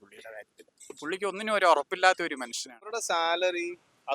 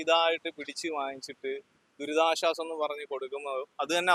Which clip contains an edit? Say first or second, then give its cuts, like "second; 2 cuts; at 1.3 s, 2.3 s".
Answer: first; 1 cut; at 2.9 s